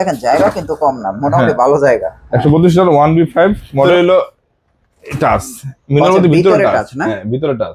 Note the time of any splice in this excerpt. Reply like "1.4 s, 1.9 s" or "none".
3.9 s